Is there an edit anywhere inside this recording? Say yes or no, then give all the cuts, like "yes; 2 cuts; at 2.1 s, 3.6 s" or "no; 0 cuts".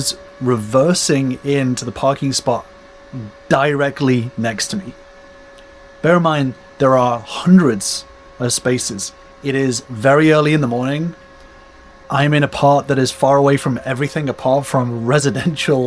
no; 0 cuts